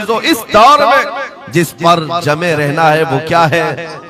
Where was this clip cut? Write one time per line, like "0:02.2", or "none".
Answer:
none